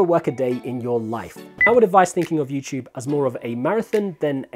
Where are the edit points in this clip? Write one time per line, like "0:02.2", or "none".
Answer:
0:01.7

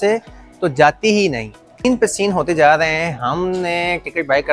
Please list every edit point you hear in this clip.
0:01.8

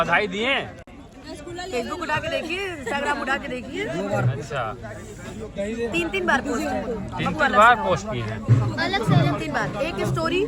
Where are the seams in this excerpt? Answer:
none

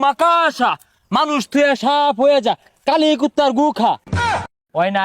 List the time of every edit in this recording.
0:04.1

